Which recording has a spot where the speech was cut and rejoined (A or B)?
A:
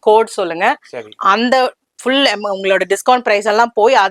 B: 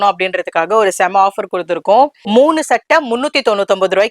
B